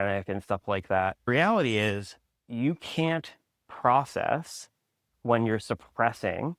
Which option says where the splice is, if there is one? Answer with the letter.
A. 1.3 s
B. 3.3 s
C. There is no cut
A